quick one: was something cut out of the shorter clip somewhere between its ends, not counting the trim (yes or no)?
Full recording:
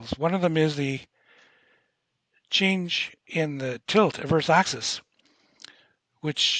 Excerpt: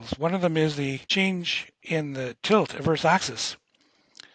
yes